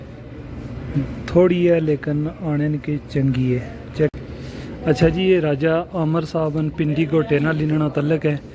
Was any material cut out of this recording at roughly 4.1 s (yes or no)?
yes